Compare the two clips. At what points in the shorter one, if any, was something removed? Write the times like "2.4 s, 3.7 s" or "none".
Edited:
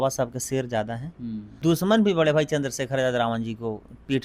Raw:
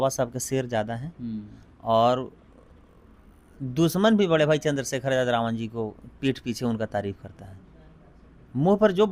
1.5 s